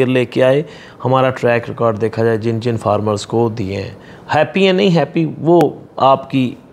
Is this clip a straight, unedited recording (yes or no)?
yes